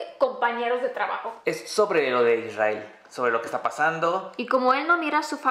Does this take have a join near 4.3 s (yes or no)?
yes